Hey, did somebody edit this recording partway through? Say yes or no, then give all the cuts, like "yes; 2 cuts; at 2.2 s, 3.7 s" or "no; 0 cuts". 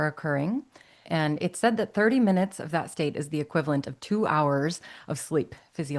yes; 1 cut; at 1.0 s